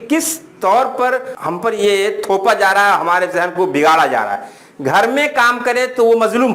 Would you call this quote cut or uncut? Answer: cut